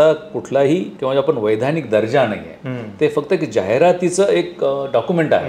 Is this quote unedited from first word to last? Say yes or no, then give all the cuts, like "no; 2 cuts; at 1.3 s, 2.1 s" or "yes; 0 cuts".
no; 1 cut; at 0.9 s